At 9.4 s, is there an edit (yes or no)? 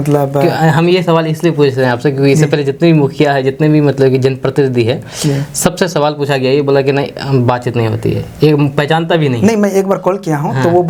no